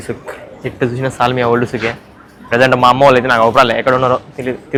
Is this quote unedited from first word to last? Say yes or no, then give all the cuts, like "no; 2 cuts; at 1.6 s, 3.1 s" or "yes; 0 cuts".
yes; 0 cuts